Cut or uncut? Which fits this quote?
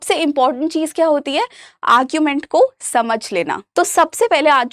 cut